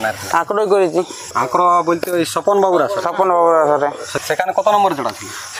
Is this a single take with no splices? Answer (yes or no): no